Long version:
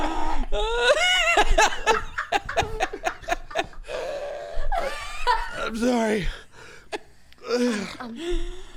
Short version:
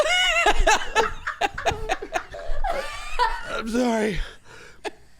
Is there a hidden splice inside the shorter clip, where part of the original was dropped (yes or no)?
yes